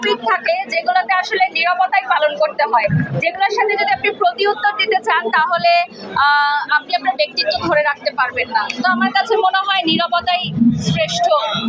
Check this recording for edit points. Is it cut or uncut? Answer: uncut